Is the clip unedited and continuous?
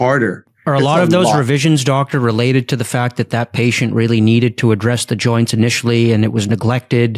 yes; 0 cuts

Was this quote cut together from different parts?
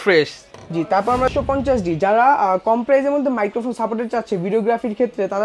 yes; 1 cut; at 1.3 s

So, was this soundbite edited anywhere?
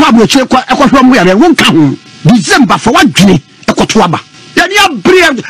yes; 2 cuts; at 2.1 s, 4.3 s

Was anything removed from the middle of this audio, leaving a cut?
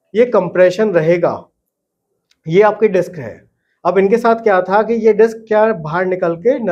no; 0 cuts

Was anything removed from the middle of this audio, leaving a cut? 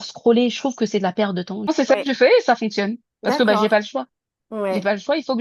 yes; 1 cut; at 1.7 s

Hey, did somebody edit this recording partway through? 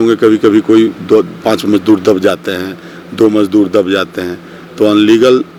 no; 0 cuts

